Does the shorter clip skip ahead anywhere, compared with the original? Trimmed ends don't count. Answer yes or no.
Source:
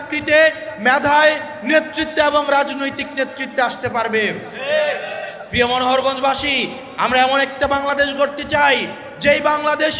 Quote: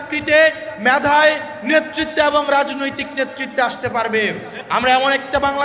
yes